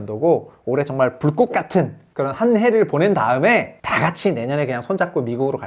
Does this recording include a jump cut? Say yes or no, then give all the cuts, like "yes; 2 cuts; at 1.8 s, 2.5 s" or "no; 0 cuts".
yes; 2 cuts; at 2.0 s, 3.8 s